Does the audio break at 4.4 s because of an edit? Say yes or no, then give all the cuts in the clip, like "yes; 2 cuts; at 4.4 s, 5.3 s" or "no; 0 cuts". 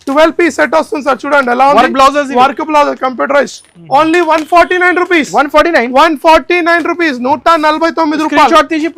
no; 0 cuts